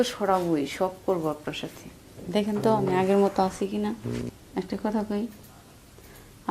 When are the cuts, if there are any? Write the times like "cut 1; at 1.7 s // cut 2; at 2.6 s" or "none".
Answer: cut 1; at 4.4 s

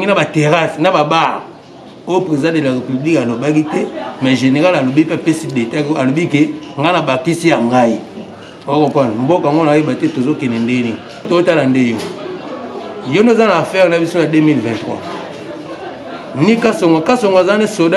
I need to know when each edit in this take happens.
cut 1; at 11.3 s

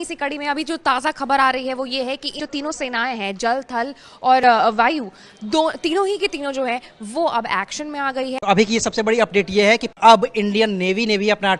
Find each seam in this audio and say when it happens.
cut 1; at 8.4 s

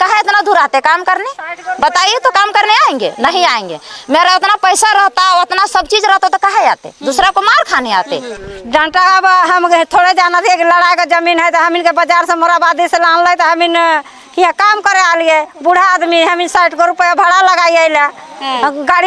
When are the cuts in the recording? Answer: cut 1; at 8.4 s

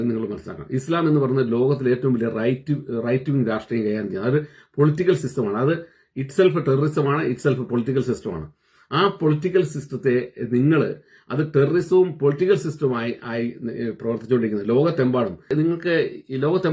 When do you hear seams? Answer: cut 1; at 15.5 s

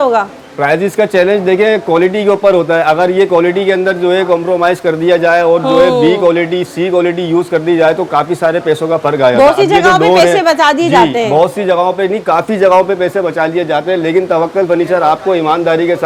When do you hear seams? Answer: none

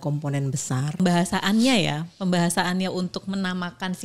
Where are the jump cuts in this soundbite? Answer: cut 1; at 1.0 s

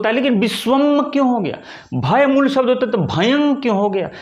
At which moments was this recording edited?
none

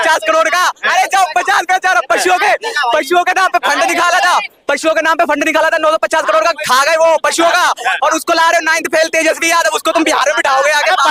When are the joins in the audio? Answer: none

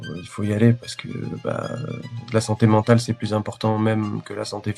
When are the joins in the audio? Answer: none

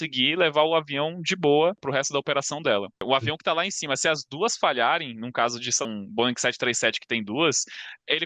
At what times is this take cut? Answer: cut 1; at 1.8 s // cut 2; at 3.0 s // cut 3; at 5.8 s

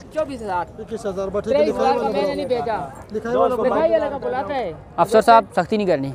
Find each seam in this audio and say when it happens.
none

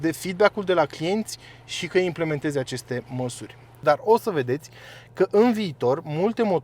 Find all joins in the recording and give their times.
cut 1; at 3.8 s

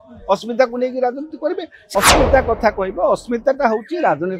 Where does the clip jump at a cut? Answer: cut 1; at 1.9 s

